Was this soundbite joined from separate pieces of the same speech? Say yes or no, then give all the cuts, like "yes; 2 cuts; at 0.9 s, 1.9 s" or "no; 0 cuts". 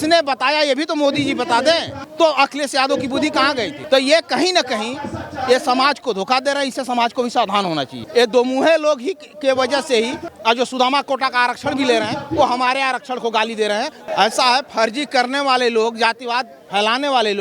yes; 5 cuts; at 1.9 s, 3.8 s, 8.0 s, 10.2 s, 14.0 s